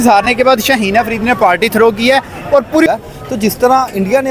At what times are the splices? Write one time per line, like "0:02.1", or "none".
0:02.9